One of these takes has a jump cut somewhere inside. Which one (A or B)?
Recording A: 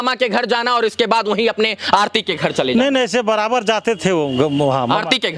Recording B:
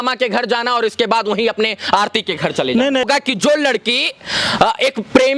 B